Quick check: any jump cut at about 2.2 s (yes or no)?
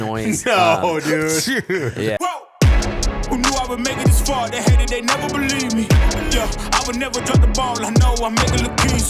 yes